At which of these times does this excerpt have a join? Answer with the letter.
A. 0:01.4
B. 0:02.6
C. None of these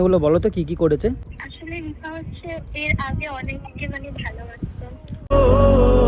A